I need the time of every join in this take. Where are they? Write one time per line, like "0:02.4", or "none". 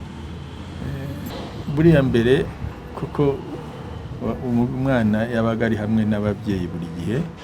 0:01.3